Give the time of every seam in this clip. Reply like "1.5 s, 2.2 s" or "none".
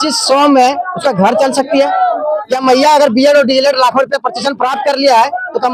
none